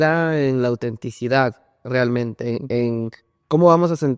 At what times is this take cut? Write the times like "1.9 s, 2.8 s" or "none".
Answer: none